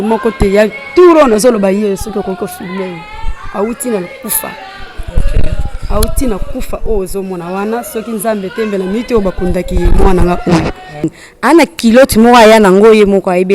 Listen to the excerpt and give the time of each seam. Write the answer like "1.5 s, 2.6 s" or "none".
11.2 s